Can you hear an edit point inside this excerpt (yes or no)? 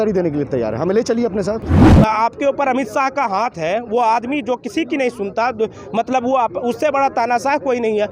yes